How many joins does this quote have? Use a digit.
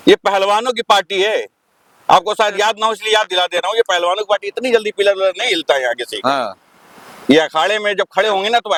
0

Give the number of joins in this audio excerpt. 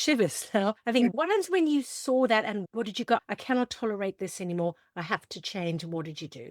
1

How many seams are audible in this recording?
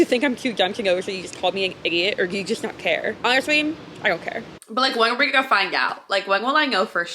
2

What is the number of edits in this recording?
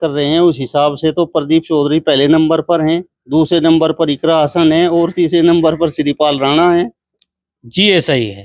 0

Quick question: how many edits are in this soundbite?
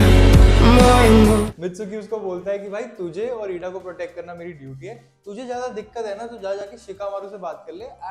0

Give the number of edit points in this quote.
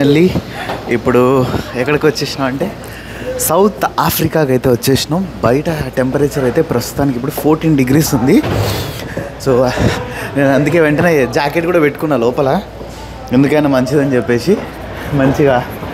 0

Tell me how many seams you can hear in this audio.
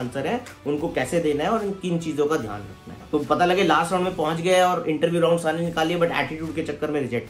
1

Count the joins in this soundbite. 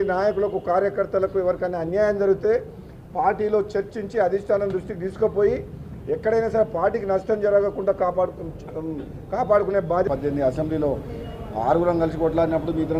1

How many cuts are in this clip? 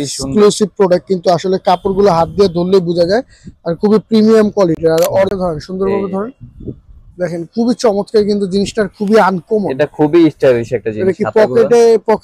1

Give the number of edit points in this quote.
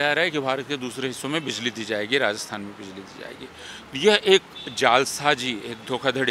0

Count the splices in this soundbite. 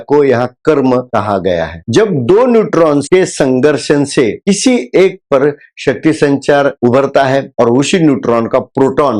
1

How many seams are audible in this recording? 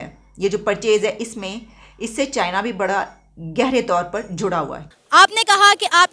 1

